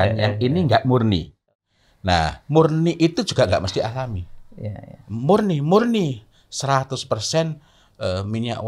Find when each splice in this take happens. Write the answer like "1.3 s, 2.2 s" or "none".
1.4 s

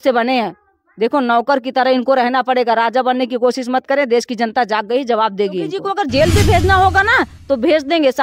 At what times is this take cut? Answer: 5.8 s

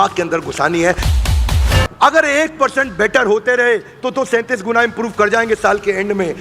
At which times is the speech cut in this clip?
1.4 s

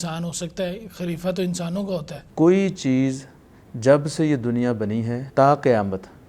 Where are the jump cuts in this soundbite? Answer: 2.2 s, 5.2 s

